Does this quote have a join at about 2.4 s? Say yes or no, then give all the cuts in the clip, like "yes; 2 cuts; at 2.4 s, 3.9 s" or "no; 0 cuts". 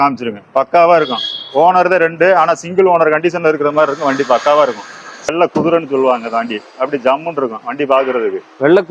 no; 1 cut; at 5.3 s